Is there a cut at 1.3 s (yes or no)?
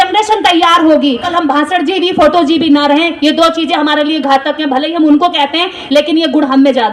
yes